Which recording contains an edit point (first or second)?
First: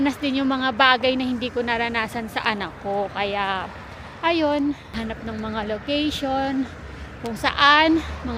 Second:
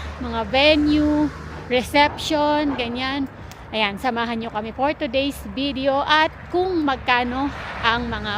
first